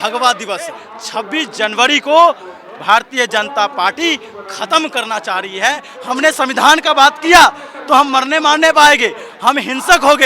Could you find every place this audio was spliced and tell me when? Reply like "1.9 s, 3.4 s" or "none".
0.9 s, 5.9 s